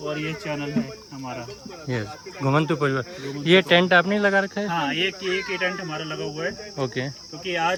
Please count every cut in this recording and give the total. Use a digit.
0